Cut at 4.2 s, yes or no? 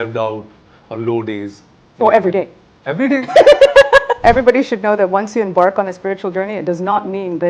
yes